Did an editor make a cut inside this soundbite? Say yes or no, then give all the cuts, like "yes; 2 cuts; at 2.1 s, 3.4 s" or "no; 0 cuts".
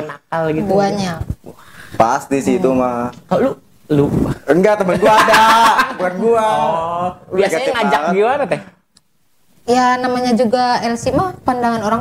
no; 0 cuts